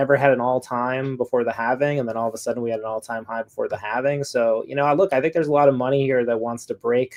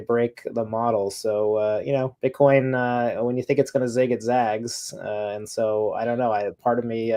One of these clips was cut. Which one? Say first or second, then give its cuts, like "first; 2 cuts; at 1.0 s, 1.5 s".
second; 1 cut; at 2.1 s